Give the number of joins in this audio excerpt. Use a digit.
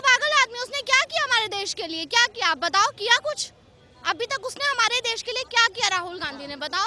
0